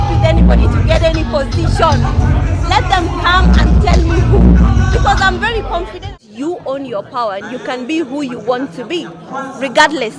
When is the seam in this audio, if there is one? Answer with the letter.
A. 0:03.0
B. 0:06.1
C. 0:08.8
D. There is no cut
B